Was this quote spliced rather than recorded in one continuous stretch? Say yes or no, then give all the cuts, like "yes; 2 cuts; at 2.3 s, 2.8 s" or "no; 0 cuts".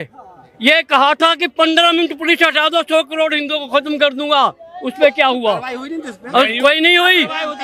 no; 0 cuts